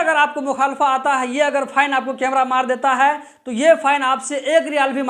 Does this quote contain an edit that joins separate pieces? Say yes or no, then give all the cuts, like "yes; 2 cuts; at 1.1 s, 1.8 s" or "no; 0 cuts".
no; 0 cuts